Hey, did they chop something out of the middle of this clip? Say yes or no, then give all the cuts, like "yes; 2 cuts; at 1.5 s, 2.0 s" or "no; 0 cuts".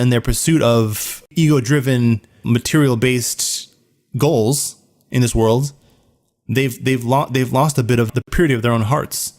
yes; 3 cuts; at 1.3 s, 2.4 s, 8.1 s